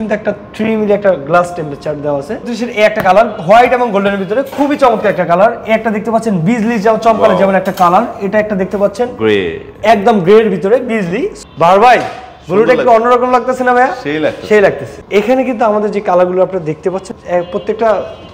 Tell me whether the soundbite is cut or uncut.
cut